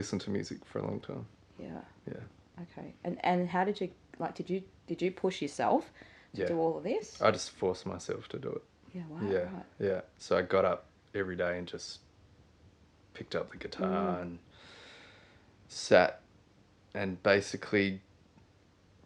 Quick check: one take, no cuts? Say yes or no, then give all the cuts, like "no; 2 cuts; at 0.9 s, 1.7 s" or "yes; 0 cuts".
yes; 0 cuts